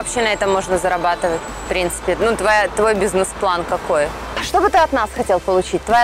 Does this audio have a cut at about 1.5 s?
yes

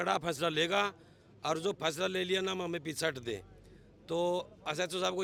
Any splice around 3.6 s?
no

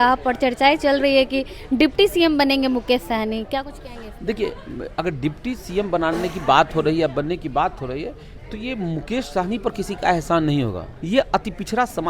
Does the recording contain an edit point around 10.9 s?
yes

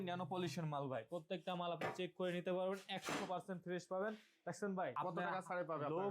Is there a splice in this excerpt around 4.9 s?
yes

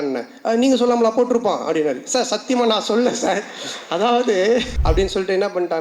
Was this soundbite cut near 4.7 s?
yes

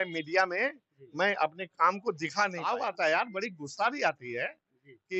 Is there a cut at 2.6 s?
yes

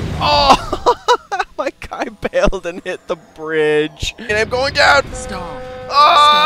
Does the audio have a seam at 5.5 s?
no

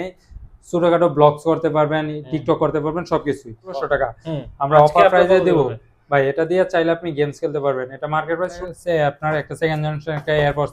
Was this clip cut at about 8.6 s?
yes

